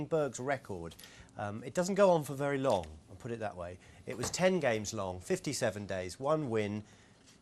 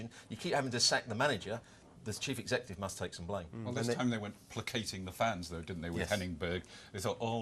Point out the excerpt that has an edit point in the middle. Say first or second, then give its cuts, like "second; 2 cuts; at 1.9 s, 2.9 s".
first; 1 cut; at 1.5 s